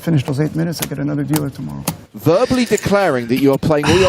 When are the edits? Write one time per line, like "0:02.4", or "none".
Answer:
0:02.1